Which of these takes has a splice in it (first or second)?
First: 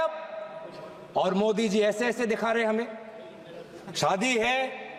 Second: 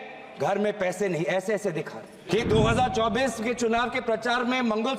second